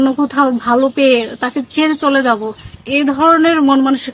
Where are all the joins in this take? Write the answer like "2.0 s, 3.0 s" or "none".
2.9 s